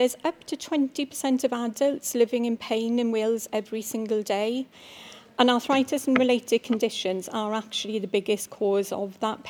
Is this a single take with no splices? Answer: no; 1 cut; at 4.8 s

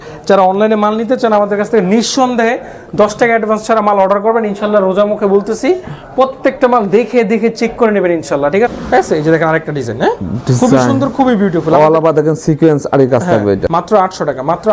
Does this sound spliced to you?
yes; 2 cuts; at 8.7 s, 13.6 s

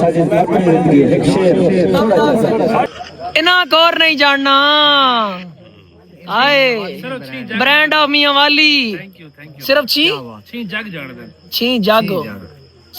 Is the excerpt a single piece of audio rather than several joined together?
no; 1 cut; at 2.9 s

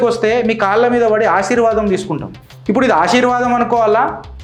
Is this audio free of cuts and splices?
yes; 0 cuts

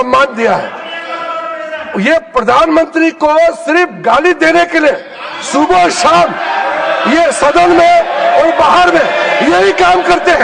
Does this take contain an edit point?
no; 0 cuts

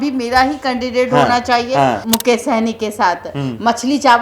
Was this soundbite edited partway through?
yes; 1 cut; at 2.0 s

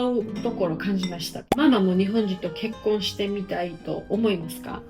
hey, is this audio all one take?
no; 1 cut; at 1.5 s

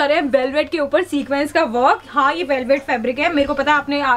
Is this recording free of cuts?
yes; 0 cuts

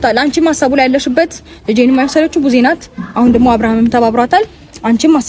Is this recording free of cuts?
yes; 0 cuts

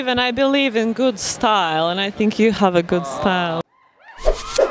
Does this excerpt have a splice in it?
yes; 1 cut; at 3.6 s

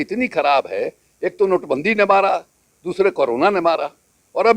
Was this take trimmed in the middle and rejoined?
no; 0 cuts

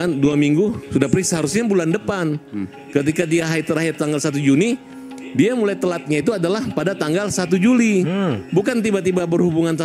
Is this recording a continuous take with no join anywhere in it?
yes; 0 cuts

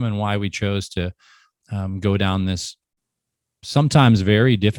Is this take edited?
no; 0 cuts

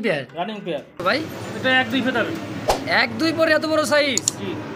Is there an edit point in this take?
yes; 1 cut; at 1.0 s

